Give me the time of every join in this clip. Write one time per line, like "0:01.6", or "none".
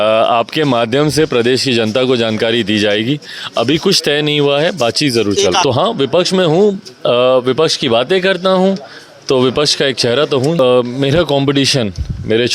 0:05.6
0:10.6